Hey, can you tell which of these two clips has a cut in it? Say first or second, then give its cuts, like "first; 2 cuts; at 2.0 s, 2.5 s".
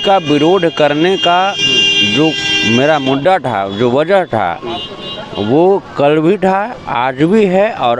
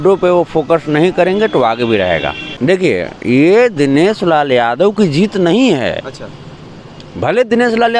second; 1 cut; at 2.4 s